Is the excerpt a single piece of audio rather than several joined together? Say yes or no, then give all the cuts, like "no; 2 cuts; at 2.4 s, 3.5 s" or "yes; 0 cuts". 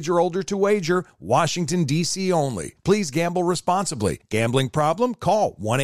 yes; 0 cuts